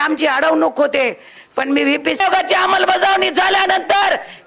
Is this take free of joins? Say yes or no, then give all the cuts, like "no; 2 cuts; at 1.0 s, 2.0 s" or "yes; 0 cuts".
no; 1 cut; at 2.2 s